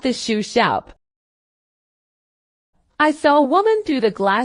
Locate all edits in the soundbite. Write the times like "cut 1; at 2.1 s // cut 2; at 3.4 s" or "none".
none